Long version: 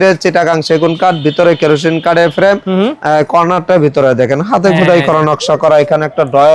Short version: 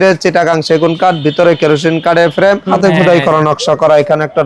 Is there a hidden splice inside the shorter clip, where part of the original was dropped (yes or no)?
yes